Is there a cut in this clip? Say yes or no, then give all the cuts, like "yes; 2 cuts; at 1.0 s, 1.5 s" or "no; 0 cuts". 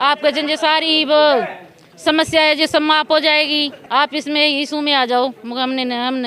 yes; 1 cut; at 3.8 s